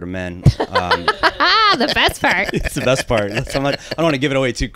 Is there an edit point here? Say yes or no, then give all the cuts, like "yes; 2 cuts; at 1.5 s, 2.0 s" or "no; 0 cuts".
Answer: no; 0 cuts